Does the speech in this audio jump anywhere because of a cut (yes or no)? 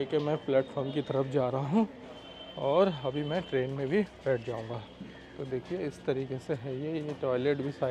no